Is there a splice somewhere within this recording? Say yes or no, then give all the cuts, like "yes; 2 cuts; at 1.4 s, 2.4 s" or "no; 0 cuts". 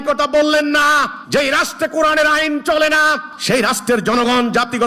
yes; 2 cuts; at 1.2 s, 3.3 s